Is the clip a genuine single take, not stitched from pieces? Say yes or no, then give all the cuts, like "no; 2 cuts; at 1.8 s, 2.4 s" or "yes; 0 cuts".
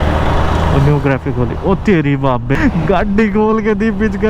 yes; 0 cuts